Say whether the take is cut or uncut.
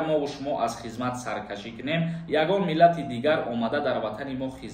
uncut